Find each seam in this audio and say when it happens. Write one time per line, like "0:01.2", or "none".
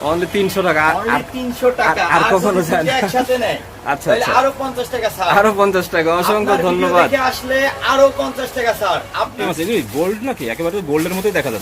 0:09.4